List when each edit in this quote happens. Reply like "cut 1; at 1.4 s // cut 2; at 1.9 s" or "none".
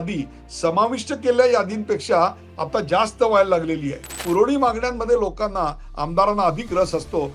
cut 1; at 4.2 s